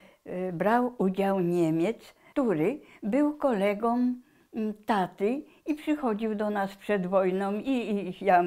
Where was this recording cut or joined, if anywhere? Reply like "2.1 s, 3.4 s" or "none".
2.2 s